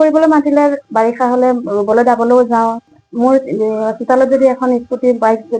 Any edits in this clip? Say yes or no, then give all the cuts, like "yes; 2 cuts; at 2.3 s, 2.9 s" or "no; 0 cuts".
yes; 1 cut; at 3.0 s